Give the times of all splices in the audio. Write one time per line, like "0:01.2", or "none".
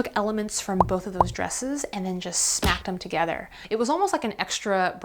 0:03.6